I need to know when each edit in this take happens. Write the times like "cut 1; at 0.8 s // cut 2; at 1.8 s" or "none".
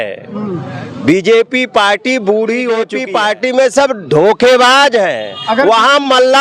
cut 1; at 3.0 s